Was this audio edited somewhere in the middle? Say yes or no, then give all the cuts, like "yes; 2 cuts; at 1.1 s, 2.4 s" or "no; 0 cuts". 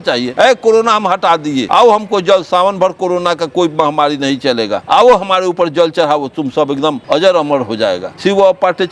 no; 0 cuts